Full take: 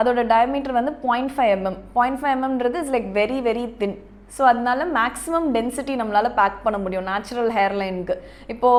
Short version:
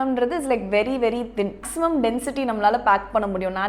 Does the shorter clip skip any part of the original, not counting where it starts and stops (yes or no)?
yes